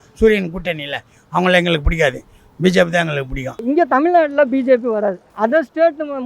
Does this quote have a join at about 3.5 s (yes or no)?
yes